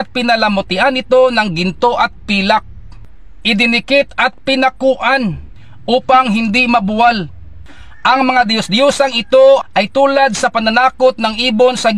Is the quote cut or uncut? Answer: cut